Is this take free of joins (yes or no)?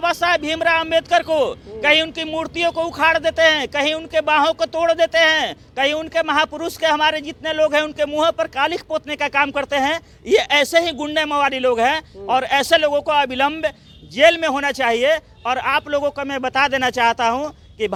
yes